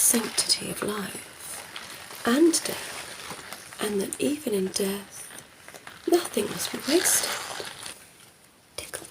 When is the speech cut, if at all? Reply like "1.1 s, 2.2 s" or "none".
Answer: 8.0 s